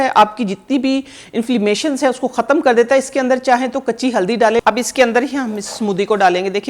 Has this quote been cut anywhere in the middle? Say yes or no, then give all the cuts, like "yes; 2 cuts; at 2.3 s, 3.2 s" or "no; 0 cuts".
yes; 1 cut; at 4.6 s